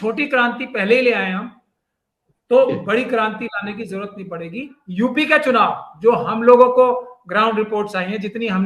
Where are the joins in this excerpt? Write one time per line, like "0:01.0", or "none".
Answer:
0:04.7